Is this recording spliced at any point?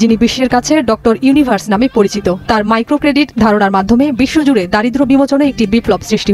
no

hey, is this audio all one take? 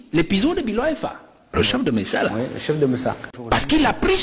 no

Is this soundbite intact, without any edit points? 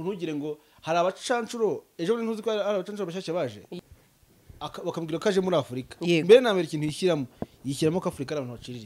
no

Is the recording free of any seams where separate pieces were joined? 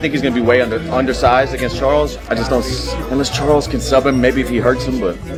yes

